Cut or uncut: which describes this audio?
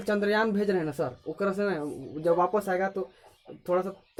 uncut